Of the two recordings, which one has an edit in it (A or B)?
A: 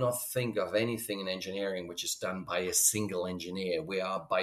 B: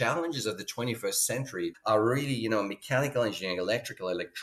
B